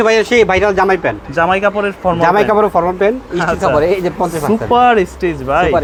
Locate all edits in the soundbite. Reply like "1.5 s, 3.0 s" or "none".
none